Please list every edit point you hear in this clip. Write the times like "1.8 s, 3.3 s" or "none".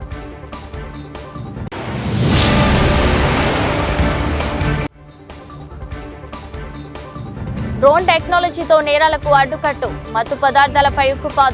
1.5 s, 7.7 s

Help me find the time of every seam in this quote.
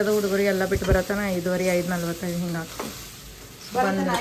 none

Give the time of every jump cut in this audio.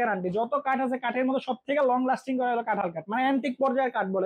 none

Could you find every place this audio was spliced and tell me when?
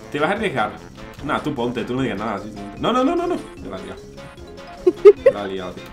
none

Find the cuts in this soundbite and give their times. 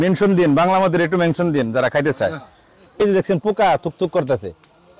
3.0 s

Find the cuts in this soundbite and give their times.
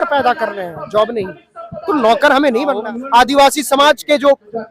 2.8 s

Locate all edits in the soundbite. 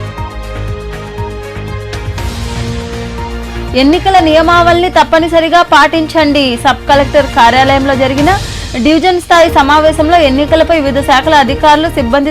2.0 s

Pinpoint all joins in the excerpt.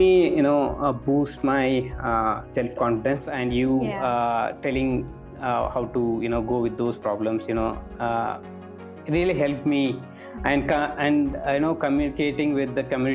3.3 s

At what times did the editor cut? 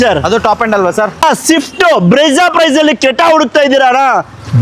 1.2 s

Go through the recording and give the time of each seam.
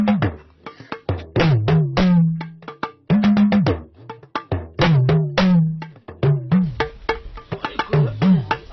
6.4 s

